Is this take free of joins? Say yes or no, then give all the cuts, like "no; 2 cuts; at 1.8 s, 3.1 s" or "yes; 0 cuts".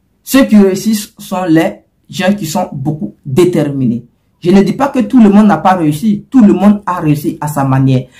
yes; 0 cuts